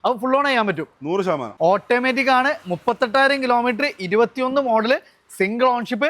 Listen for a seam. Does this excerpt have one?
yes; 1 cut; at 1.5 s

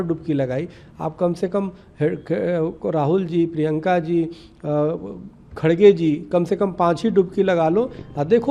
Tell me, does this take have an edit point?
no; 0 cuts

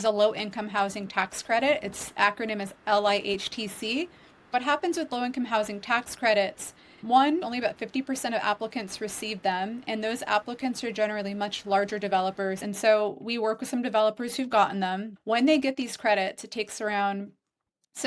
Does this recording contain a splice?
yes; 4 cuts; at 4.5 s, 7.4 s, 12.6 s, 15.1 s

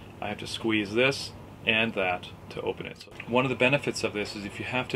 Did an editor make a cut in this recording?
yes; 1 cut; at 3.0 s

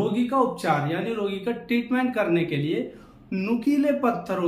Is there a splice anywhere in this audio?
no; 0 cuts

